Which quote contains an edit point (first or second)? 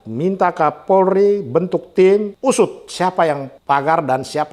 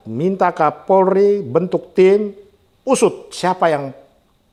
first